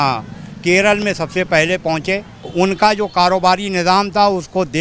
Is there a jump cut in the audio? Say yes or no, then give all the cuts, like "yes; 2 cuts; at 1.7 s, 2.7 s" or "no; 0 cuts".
yes; 1 cut; at 2.5 s